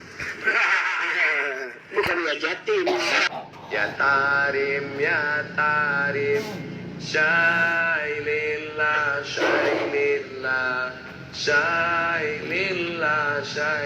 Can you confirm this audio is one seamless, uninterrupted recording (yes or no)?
no